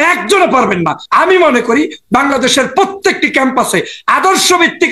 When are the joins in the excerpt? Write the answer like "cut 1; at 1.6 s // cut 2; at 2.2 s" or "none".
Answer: cut 1; at 1.0 s